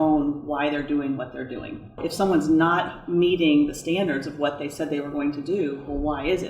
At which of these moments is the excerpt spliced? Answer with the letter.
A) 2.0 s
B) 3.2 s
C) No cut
A